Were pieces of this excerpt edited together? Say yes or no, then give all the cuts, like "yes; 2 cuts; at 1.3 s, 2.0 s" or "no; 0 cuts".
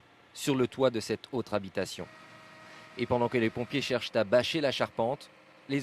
yes; 1 cut; at 1.2 s